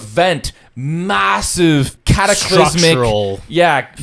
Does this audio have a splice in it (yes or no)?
yes